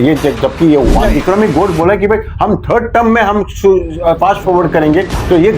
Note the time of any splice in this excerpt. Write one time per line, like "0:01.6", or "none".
0:01.1